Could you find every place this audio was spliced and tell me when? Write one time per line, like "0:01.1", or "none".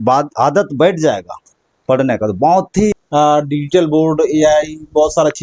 0:03.0